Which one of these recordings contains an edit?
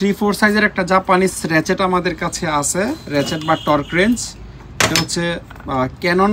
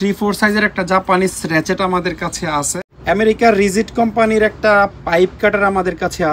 second; 1 cut; at 2.7 s

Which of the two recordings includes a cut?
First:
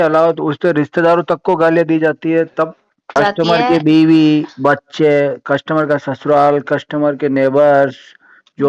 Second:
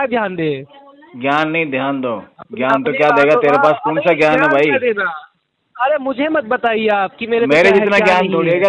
first; 1 cut; at 3.0 s

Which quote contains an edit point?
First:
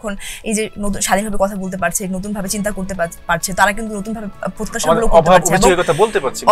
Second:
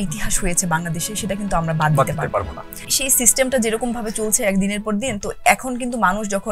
second; 1 cut; at 2.9 s

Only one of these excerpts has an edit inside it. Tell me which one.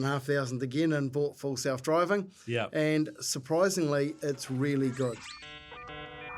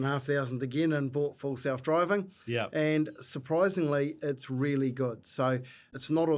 first; 1 cut; at 5.3 s

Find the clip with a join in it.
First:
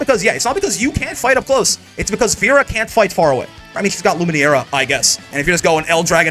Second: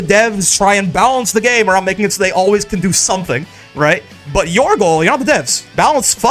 first; 2 cuts; at 3.8 s, 5.2 s

